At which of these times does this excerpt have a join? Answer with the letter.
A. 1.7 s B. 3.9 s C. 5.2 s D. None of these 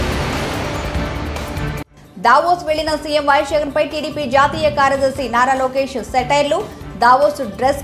A